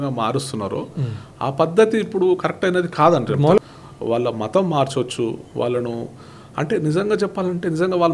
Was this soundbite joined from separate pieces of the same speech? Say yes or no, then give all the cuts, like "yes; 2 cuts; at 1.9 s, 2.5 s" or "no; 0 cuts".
yes; 1 cut; at 3.6 s